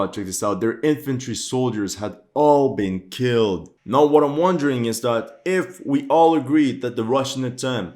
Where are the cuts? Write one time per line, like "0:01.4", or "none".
0:03.7